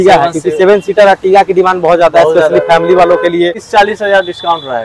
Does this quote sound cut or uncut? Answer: cut